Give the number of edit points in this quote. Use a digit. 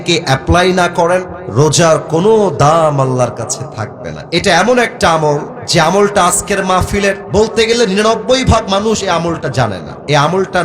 3